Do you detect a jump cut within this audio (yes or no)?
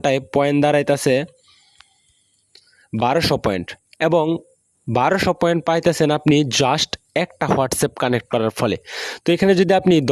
no